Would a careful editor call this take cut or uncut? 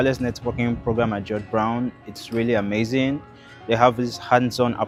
uncut